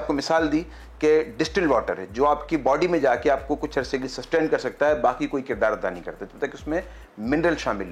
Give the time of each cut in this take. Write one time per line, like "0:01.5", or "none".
none